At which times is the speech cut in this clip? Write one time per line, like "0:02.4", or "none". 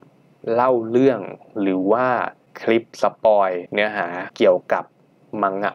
0:02.8
0:04.0

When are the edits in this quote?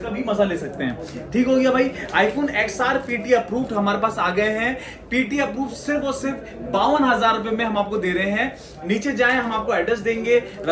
none

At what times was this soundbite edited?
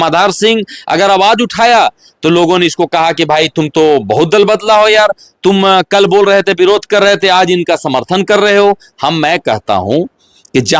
none

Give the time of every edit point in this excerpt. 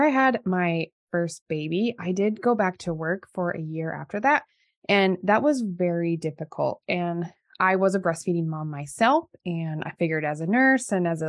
none

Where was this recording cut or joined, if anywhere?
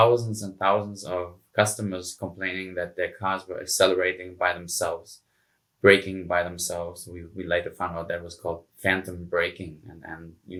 none

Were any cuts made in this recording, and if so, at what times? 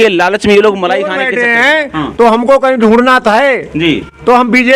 0:01.2

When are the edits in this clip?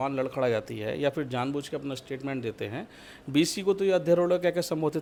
none

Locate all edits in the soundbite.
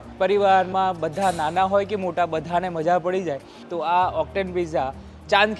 0:03.6

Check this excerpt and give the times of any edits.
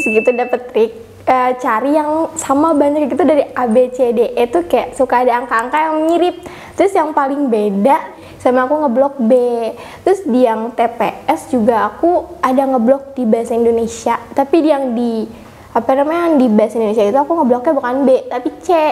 0:08.1

